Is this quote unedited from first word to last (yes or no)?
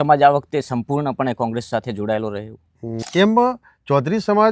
no